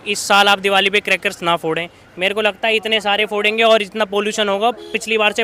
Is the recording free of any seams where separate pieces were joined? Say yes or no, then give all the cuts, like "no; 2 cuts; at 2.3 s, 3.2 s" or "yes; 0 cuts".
yes; 0 cuts